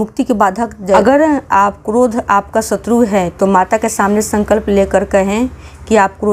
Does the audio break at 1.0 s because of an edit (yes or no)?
yes